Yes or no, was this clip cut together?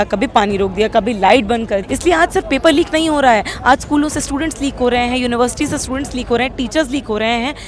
yes